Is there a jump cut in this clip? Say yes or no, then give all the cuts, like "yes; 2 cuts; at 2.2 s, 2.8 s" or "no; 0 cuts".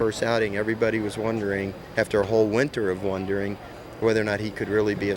no; 0 cuts